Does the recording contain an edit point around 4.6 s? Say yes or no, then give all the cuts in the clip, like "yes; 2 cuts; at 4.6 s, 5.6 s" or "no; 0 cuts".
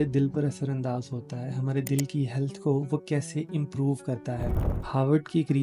yes; 1 cut; at 4.6 s